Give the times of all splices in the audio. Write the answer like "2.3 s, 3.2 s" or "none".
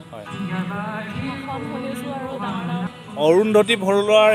2.9 s